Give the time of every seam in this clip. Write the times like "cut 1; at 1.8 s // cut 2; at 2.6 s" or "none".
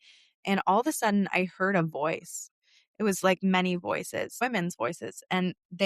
cut 1; at 2.4 s // cut 2; at 4.3 s